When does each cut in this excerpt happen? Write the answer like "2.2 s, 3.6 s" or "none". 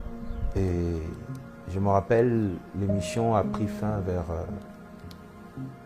none